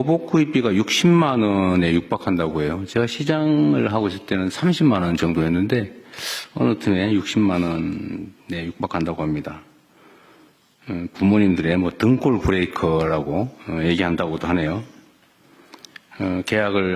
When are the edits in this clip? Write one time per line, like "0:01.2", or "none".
none

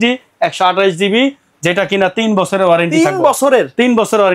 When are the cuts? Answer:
none

